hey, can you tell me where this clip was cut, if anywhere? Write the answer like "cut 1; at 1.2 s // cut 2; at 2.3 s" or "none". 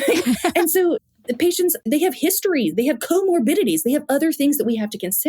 cut 1; at 1.8 s